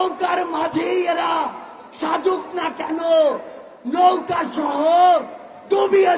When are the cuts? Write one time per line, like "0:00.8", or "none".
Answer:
none

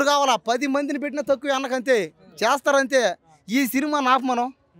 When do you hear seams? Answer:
none

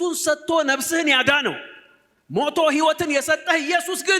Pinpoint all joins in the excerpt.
none

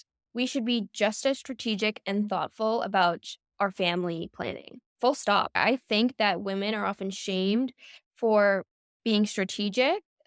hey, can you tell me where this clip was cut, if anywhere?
none

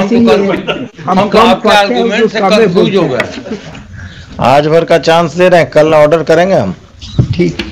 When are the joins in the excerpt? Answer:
0:03.9

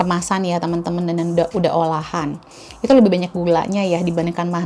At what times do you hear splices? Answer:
none

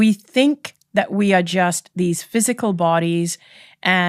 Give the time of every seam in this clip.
none

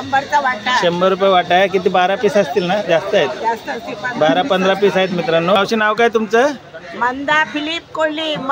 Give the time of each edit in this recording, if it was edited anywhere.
0:05.6

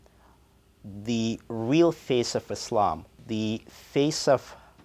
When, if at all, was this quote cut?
0:03.1

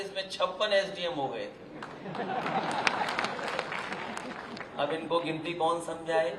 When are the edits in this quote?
none

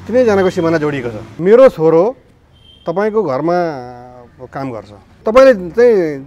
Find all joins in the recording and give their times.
0:01.3
0:05.2

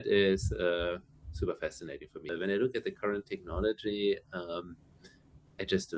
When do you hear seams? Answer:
0:02.3

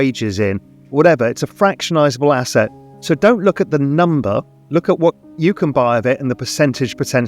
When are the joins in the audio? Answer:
0:04.6

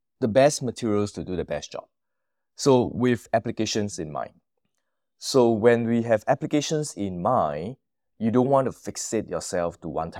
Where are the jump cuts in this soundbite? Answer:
none

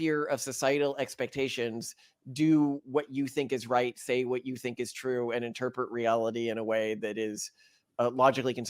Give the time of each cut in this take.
none

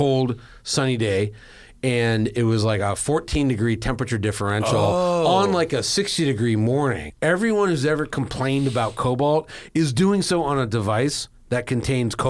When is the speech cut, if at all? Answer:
0:07.1

